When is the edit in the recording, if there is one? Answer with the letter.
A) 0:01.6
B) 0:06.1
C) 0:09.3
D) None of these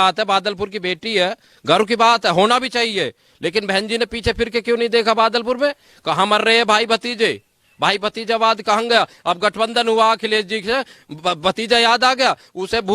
D